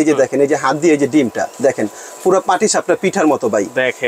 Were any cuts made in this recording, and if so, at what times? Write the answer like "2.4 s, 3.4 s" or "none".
none